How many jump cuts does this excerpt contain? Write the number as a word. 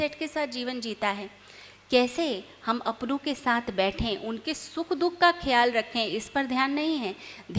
zero